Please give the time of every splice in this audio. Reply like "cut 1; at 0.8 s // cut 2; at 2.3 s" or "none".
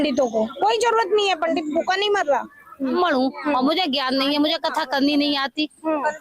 cut 1; at 3.0 s